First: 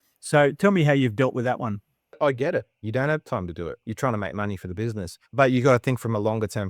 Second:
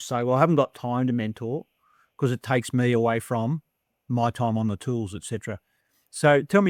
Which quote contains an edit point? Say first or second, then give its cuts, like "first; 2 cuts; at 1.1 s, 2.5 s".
first; 3 cuts; at 2.2 s, 3.8 s, 5.2 s